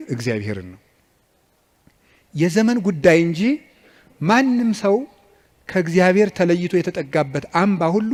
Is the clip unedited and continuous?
yes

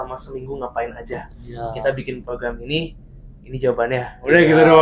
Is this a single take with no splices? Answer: yes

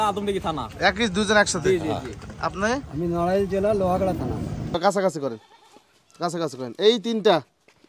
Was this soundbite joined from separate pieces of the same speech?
yes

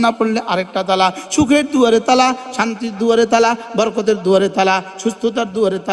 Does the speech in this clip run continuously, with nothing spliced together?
yes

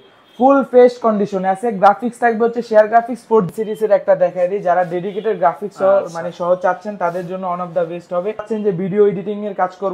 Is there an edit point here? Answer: yes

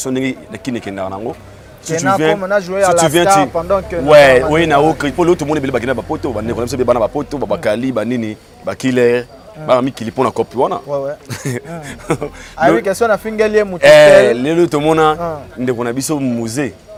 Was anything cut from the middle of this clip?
no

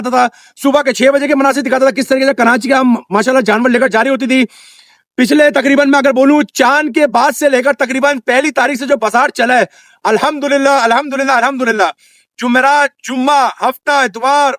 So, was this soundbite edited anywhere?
no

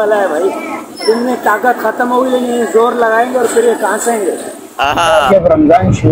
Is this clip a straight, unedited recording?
no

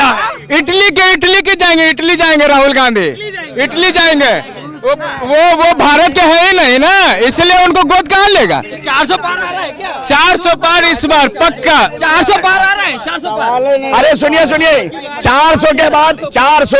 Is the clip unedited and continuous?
yes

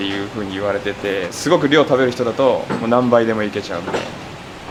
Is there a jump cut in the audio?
no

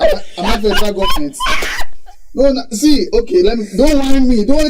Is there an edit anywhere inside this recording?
no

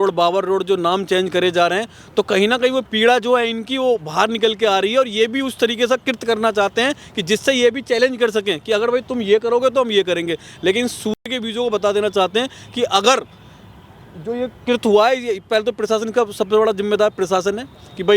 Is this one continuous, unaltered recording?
yes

